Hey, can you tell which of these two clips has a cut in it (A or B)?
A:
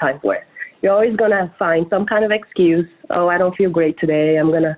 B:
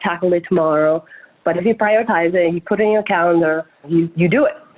B